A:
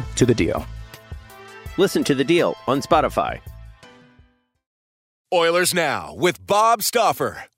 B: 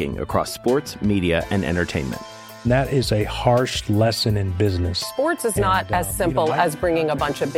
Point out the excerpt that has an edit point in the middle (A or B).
A